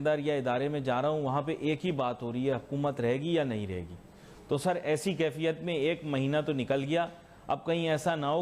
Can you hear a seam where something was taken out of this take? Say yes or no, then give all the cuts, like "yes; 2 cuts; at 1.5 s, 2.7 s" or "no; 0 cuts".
no; 0 cuts